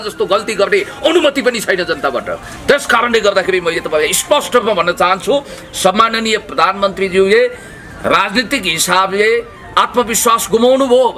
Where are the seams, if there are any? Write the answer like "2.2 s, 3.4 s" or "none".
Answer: none